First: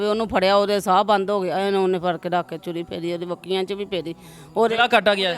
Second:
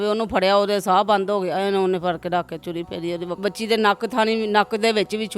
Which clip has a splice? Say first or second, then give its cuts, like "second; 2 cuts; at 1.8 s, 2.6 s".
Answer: second; 1 cut; at 3.4 s